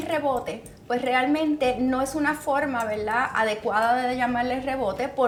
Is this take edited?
no; 0 cuts

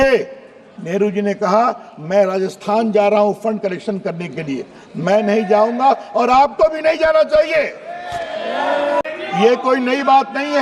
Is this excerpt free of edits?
no; 1 cut; at 9.0 s

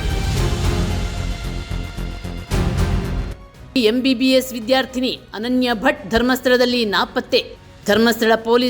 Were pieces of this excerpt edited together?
yes; 1 cut; at 3.4 s

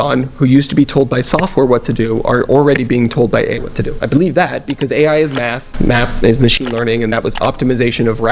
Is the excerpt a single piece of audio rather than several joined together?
yes; 0 cuts

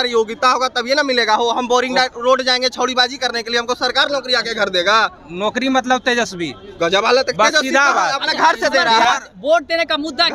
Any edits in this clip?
no; 0 cuts

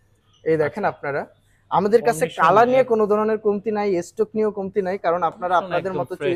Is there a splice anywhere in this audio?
no; 0 cuts

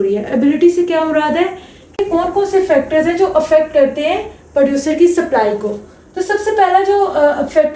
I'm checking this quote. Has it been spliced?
yes; 1 cut; at 2.0 s

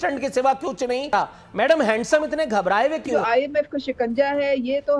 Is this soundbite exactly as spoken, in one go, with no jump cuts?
no; 2 cuts; at 1.1 s, 3.1 s

